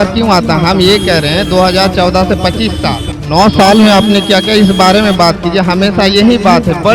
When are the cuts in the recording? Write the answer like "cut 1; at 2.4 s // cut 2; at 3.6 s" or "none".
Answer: cut 1; at 3.1 s